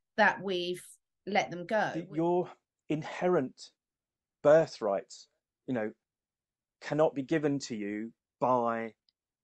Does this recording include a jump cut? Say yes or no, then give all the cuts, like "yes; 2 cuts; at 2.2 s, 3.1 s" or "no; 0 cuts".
yes; 1 cut; at 2.0 s